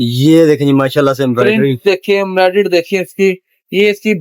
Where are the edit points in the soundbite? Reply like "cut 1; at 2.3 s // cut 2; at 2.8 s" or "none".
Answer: none

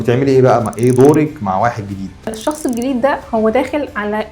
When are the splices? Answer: cut 1; at 2.4 s

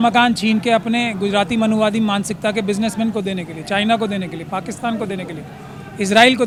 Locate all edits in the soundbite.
none

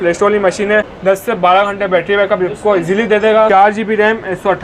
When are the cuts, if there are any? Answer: cut 1; at 0.9 s // cut 2; at 3.5 s

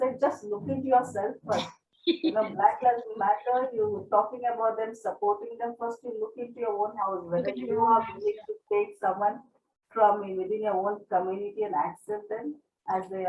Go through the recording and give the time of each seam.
none

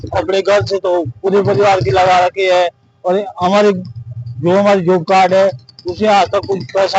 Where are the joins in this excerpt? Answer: none

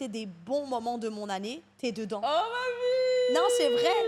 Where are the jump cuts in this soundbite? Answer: none

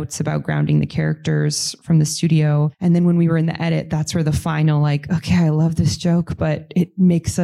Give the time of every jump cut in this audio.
cut 1; at 2.7 s

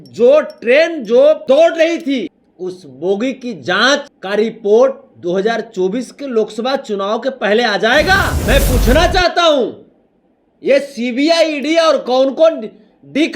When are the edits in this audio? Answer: cut 1; at 1.4 s // cut 2; at 2.4 s // cut 3; at 4.1 s // cut 4; at 8.3 s

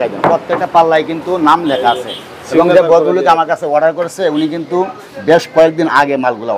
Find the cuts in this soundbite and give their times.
none

